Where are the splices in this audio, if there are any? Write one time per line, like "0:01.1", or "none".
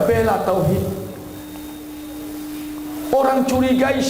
none